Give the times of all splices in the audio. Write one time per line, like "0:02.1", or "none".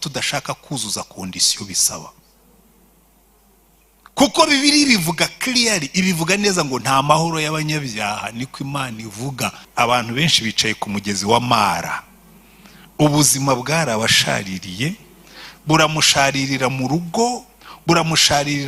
0:09.6